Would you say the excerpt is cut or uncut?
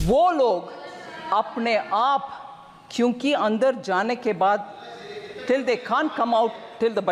uncut